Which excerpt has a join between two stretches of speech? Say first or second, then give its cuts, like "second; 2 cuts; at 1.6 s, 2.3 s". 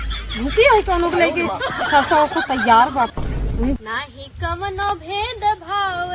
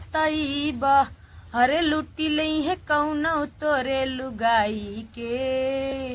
first; 1 cut; at 3.8 s